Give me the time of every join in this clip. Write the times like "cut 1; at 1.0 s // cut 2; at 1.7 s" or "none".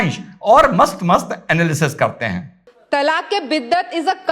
cut 1; at 2.4 s